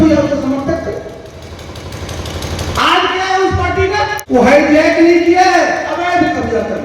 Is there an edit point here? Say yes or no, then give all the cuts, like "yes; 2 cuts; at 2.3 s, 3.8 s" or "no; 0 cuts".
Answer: yes; 1 cut; at 4.2 s